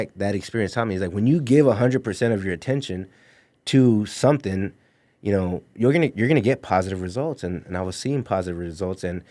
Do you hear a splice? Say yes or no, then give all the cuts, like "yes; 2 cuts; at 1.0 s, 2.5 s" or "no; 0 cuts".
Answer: no; 0 cuts